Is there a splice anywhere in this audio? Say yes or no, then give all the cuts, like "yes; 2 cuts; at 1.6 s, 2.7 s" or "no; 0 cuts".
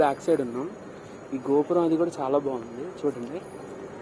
no; 0 cuts